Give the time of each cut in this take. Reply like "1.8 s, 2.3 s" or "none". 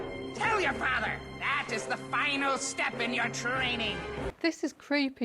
4.3 s